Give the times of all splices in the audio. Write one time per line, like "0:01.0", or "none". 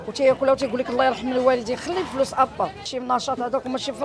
0:02.9